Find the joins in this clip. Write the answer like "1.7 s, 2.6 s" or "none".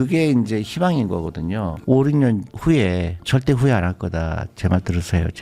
1.8 s